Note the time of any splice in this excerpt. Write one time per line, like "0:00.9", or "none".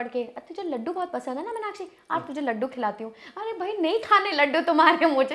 none